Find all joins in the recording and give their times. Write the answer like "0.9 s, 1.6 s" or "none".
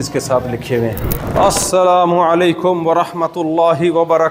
1.2 s